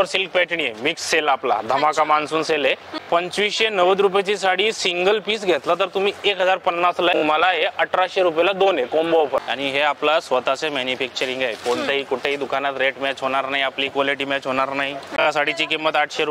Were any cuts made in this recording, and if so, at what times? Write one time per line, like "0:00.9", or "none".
0:03.0
0:07.2
0:09.5
0:15.2